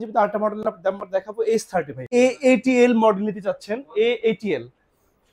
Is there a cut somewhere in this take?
yes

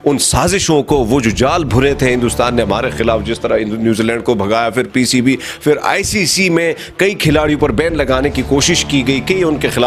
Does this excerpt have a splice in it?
no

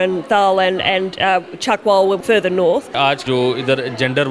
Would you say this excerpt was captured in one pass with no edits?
no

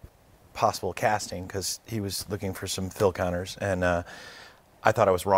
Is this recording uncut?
yes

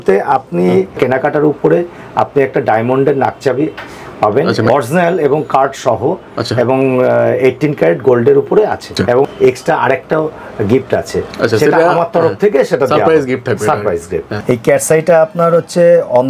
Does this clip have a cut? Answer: yes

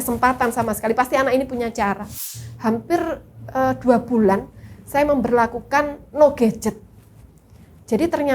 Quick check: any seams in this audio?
yes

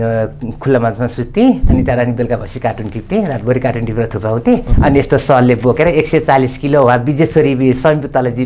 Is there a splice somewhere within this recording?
yes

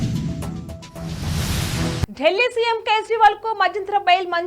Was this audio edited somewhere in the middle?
yes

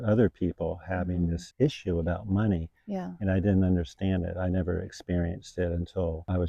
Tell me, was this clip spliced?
no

